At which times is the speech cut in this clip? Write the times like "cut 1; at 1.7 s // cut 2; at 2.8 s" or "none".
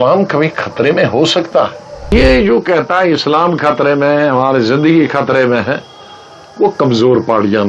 cut 1; at 2.1 s